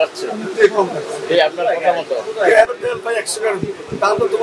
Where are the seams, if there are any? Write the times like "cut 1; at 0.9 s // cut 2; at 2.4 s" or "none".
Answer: cut 1; at 2.7 s